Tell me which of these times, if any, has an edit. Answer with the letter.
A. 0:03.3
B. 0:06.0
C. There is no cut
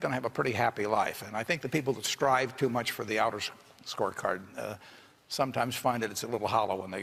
C